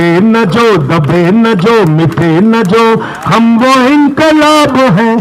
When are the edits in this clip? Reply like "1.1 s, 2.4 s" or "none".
none